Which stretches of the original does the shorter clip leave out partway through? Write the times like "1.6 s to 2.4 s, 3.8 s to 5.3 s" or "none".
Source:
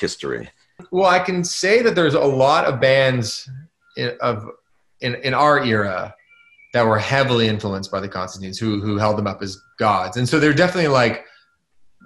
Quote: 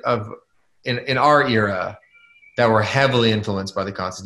none